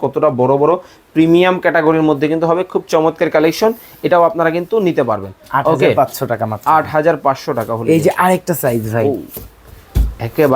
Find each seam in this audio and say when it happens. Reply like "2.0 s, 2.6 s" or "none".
none